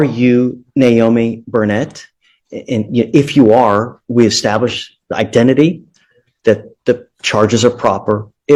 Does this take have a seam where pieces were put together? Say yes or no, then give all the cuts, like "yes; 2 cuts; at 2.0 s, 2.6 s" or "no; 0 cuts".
no; 0 cuts